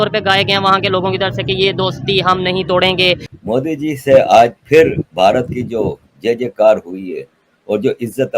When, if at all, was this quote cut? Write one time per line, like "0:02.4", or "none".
0:03.2